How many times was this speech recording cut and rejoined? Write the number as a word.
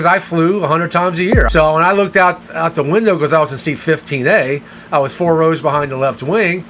one